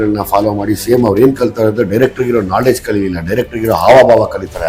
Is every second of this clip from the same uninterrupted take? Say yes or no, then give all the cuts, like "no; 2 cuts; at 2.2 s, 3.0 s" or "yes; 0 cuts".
yes; 0 cuts